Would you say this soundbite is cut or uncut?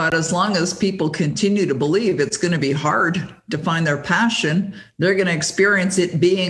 uncut